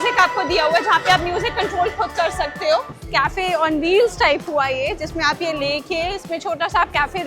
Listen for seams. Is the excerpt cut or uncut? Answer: cut